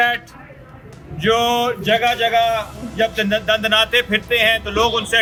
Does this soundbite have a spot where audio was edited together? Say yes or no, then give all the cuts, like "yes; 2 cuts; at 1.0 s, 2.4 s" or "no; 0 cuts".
no; 0 cuts